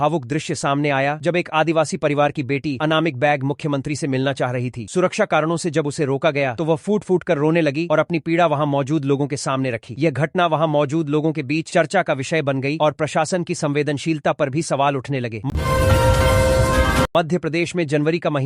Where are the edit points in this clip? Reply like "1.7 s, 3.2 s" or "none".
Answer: 15.5 s, 17.1 s